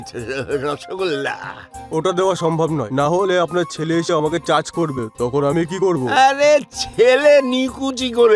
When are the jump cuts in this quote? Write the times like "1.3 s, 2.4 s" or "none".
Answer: none